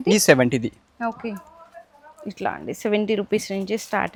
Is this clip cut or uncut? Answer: uncut